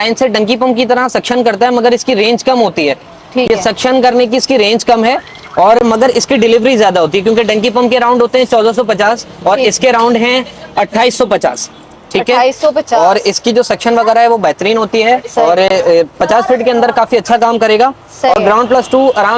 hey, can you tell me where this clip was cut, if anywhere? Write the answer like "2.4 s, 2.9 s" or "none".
none